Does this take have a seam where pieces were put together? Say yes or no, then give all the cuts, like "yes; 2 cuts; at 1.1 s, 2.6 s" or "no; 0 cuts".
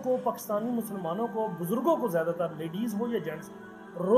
no; 0 cuts